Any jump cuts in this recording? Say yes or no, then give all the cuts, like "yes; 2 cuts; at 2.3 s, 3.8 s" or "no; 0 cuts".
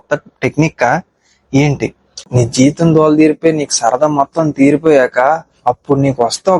yes; 1 cut; at 2.3 s